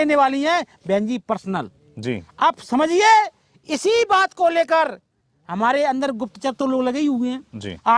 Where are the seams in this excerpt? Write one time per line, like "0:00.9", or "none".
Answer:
none